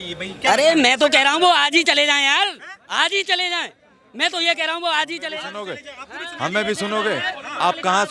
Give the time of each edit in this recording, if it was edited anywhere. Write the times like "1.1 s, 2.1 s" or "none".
none